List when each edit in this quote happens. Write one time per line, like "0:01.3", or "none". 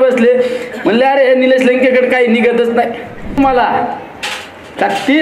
0:03.4